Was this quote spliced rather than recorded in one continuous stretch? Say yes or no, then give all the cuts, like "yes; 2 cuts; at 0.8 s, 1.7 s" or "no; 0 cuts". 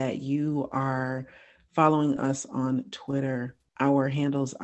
no; 0 cuts